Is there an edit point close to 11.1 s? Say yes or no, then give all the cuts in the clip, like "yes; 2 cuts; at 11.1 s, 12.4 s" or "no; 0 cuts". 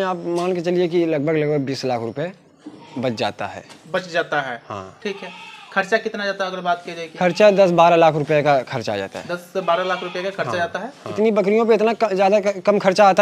yes; 1 cut; at 11.1 s